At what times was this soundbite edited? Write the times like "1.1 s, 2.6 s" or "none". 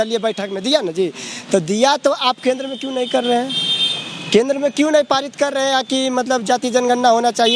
none